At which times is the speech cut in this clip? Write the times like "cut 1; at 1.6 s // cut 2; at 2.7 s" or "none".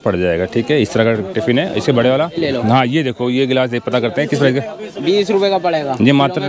cut 1; at 2.4 s